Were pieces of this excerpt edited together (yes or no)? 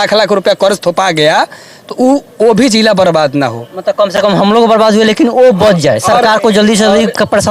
no